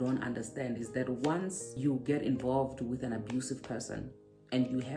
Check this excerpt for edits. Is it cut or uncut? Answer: cut